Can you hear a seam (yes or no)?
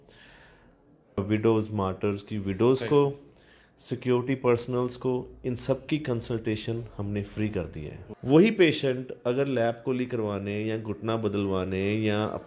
yes